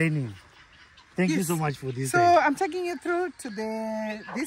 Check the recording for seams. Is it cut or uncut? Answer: uncut